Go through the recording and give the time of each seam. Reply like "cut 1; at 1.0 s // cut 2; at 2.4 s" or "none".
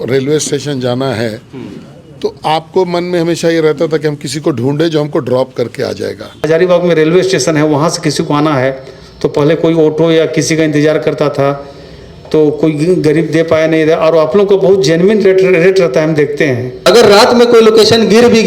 cut 1; at 6.4 s // cut 2; at 16.7 s

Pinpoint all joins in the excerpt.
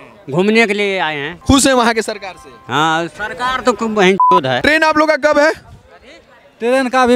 cut 1; at 1.3 s // cut 2; at 4.6 s

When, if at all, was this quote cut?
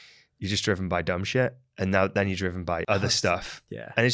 cut 1; at 2.8 s

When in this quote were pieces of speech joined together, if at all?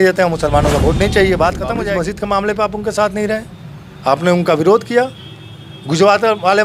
cut 1; at 1.9 s

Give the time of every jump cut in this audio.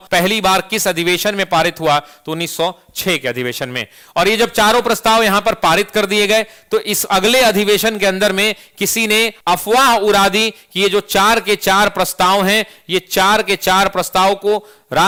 none

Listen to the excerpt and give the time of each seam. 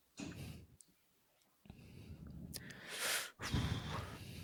none

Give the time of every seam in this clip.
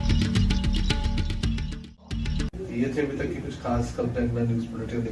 none

